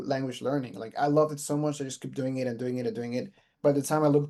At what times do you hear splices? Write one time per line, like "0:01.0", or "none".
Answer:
none